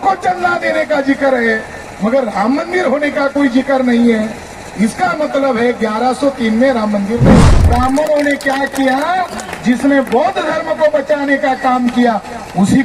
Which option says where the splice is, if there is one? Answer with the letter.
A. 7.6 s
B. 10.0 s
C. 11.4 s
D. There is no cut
A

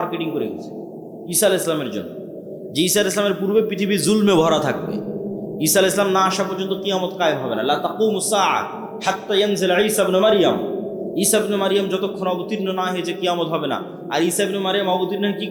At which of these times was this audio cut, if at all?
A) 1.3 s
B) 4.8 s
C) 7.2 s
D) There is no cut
D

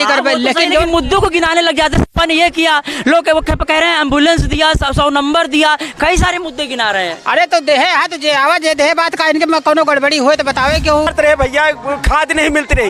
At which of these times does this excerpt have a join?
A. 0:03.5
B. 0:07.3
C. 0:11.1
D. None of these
C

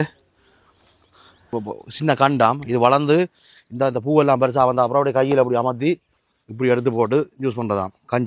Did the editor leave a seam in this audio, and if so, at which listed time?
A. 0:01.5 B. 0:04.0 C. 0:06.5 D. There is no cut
A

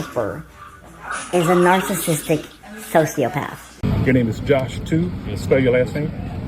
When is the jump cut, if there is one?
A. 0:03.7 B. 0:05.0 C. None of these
A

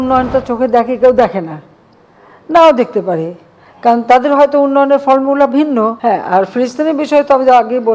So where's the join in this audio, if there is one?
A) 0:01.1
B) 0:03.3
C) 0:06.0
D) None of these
C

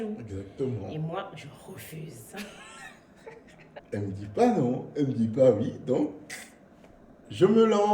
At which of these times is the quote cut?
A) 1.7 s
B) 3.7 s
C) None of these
B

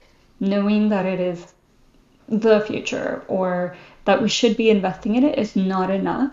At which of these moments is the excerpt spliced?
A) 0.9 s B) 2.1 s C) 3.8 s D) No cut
B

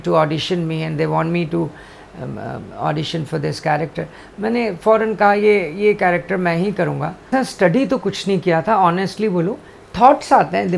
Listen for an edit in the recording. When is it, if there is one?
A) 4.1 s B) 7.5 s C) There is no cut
B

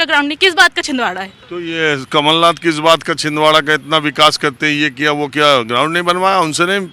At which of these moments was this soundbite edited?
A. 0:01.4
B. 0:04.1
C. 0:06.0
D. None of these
D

